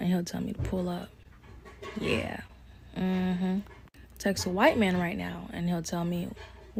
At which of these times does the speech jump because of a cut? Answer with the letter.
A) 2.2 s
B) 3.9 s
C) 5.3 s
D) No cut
D